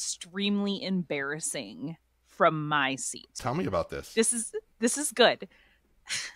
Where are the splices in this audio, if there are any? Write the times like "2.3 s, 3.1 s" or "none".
3.4 s